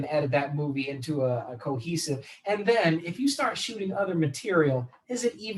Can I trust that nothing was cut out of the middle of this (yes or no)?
yes